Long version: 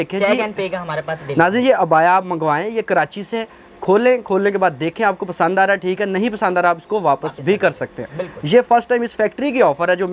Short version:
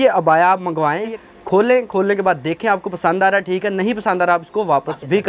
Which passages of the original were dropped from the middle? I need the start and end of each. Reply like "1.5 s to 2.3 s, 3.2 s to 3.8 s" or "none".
2.8 s to 3.5 s